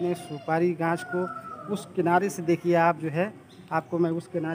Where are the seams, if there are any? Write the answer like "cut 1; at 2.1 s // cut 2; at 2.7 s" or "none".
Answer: none